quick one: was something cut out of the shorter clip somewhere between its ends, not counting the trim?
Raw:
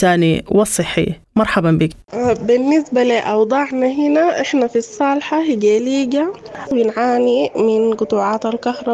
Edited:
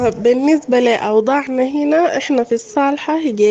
no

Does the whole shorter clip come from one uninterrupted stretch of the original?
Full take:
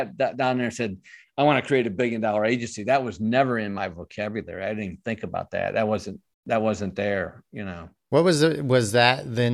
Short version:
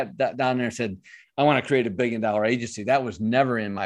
yes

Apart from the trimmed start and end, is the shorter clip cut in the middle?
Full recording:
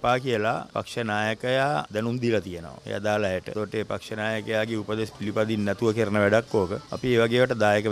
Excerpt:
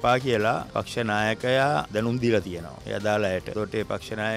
no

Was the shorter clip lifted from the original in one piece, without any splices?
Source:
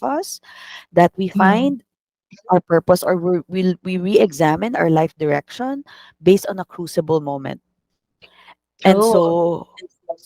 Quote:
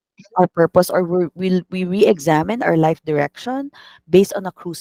yes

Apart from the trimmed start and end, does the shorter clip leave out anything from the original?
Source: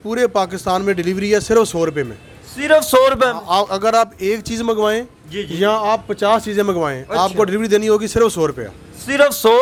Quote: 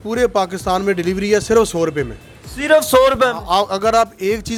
no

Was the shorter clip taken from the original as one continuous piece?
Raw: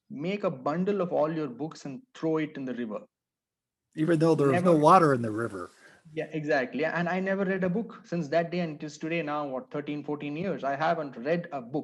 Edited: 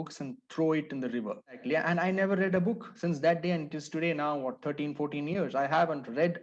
no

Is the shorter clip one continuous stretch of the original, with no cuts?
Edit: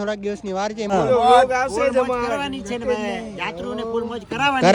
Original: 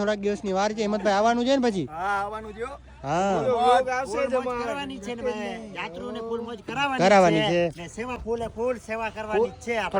no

